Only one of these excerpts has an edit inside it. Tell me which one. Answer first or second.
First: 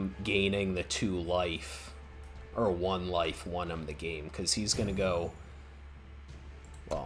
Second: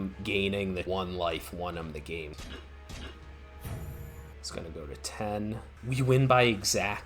second